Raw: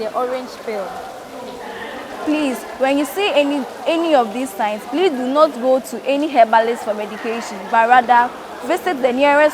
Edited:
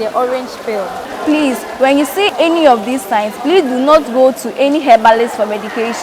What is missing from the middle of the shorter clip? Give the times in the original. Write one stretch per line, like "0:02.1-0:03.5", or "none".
0:01.1-0:02.1
0:03.3-0:03.8